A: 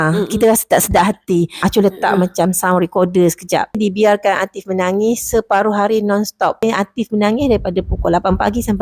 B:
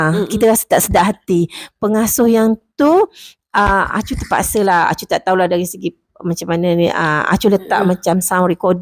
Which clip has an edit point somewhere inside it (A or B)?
A